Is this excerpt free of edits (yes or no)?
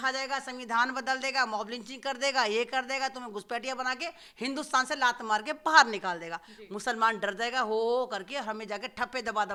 yes